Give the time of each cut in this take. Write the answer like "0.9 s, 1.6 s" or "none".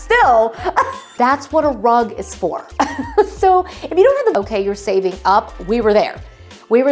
1.0 s, 4.3 s